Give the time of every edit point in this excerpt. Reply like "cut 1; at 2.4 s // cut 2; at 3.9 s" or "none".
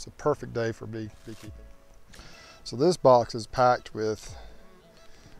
cut 1; at 1.3 s